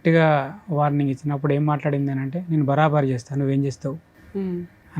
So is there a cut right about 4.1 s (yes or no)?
no